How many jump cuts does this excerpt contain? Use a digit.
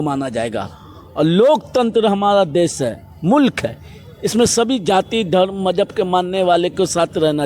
0